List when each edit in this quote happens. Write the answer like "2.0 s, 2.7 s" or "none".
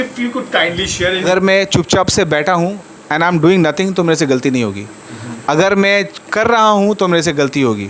1.2 s